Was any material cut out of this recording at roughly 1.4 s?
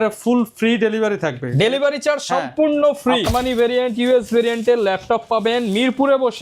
no; 1 cut; at 3.3 s

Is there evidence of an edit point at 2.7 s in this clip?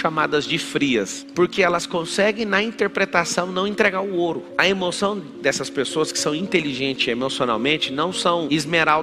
no; 1 cut; at 1.2 s

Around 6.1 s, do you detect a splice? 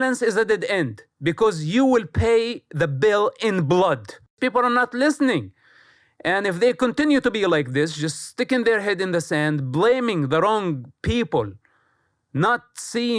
no; 1 cut; at 4.4 s

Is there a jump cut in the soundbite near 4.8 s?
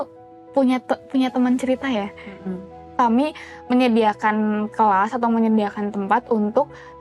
no; 1 cut; at 2.9 s

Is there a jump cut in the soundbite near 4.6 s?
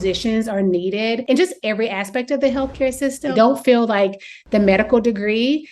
no; 2 cuts; at 1.2 s, 3.3 s

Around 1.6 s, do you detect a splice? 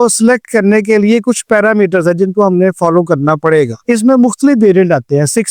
no; 1 cut; at 3.8 s

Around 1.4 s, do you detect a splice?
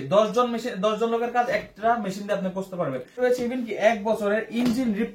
no; 1 cut; at 3.1 s

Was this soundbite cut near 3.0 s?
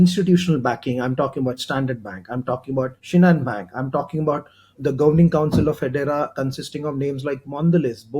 yes; 1 cut; at 3.0 s

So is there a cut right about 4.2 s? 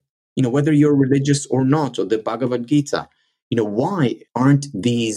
yes; 1 cut; at 4.2 s

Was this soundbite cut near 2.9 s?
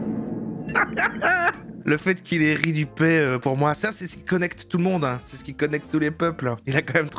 no; 0 cuts

